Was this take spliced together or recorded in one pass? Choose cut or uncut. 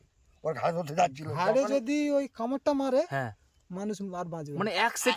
uncut